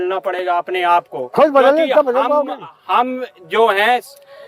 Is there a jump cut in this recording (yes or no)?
no